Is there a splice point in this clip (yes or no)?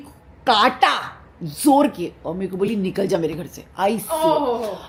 no